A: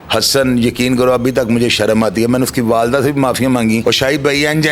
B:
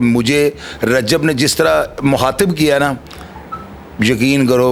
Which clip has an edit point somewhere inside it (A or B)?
A